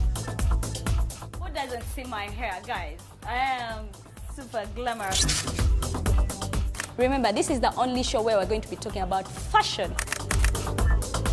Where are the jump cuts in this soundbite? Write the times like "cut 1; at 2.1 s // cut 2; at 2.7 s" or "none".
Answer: none